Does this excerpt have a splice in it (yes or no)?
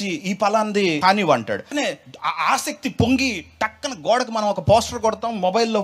yes